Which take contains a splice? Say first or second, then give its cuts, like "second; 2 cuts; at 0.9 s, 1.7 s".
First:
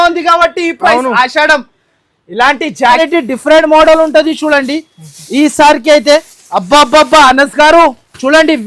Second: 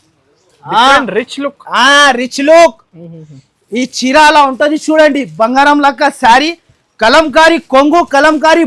first; 1 cut; at 3.0 s